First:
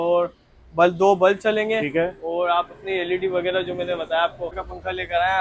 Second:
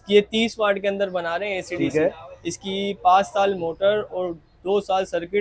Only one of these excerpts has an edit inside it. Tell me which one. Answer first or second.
first